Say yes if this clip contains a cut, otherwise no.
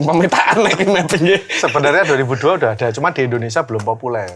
no